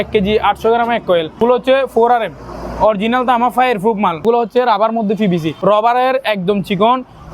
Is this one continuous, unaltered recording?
no; 3 cuts; at 1.4 s, 4.2 s, 5.5 s

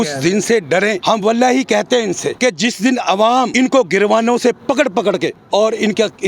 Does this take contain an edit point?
yes; 4 cuts; at 1.0 s, 2.3 s, 3.5 s, 5.4 s

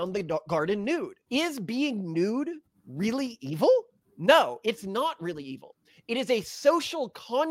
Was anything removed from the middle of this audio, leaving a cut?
yes; 1 cut; at 1.2 s

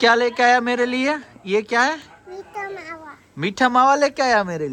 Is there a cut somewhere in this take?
no; 0 cuts

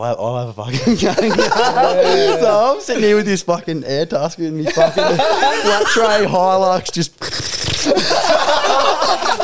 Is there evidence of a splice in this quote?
no; 0 cuts

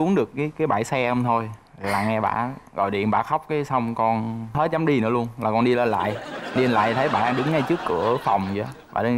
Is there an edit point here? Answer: no; 0 cuts

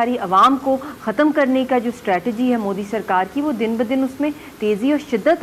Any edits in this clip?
no; 0 cuts

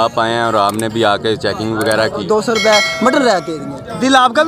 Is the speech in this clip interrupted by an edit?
yes; 1 cut; at 2.2 s

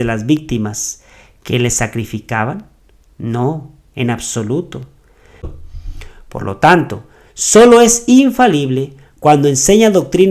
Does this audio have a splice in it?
yes; 1 cut; at 5.5 s

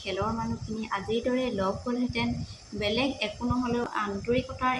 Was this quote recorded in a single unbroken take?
no; 1 cut; at 3.9 s

